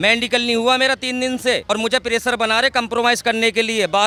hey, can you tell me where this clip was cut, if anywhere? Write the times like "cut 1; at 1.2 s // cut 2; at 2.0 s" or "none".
none